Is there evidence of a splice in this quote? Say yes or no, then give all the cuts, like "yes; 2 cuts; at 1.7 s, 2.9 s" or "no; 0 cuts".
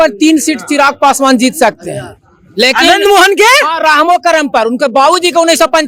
no; 0 cuts